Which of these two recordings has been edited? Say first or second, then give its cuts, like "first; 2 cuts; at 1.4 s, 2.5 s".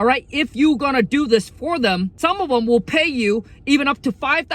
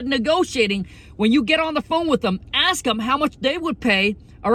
first; 1 cut; at 2.1 s